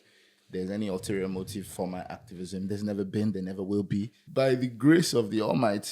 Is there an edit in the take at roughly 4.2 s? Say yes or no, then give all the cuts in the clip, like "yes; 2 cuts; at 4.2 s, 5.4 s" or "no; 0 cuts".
yes; 1 cut; at 4.2 s